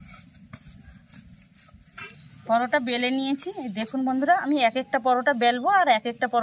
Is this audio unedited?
no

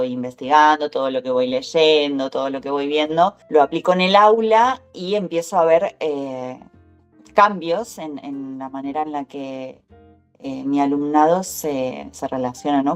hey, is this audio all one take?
yes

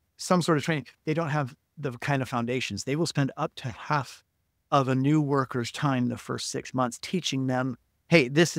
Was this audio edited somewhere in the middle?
no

